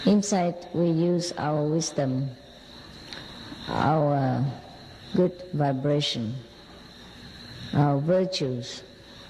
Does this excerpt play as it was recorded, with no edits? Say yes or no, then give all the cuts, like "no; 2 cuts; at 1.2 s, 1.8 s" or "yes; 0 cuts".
yes; 0 cuts